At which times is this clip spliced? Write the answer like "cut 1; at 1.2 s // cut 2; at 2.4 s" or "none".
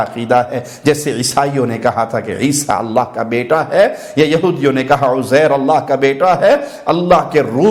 none